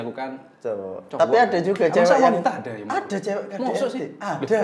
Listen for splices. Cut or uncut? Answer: uncut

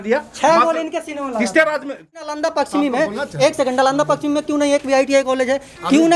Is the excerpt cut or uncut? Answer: cut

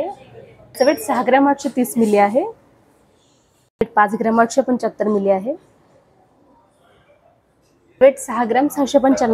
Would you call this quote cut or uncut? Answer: uncut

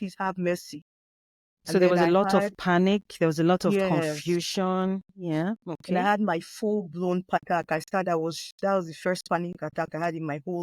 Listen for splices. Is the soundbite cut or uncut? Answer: cut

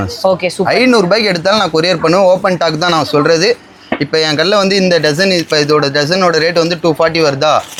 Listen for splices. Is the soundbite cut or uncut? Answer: uncut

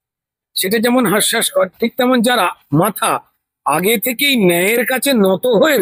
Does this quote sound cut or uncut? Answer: uncut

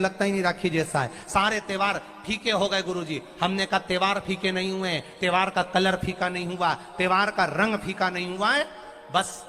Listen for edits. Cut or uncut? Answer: uncut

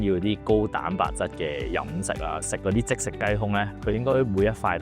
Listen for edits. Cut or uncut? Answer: cut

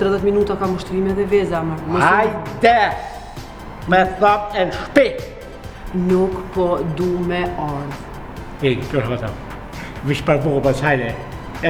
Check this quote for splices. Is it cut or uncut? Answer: uncut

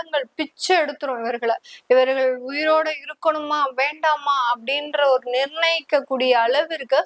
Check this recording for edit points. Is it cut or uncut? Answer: uncut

